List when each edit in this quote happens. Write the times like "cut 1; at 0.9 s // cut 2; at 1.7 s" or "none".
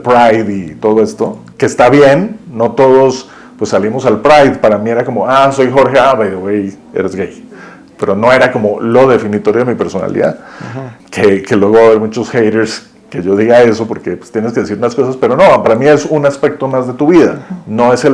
cut 1; at 1.4 s // cut 2; at 10.9 s